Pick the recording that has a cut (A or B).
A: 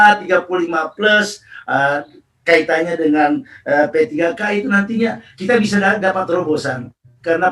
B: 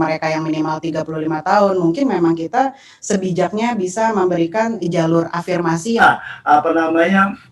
B